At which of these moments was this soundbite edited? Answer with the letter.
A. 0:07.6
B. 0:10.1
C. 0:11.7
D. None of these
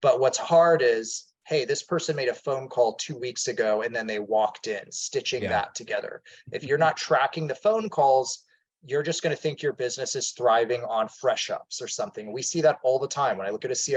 D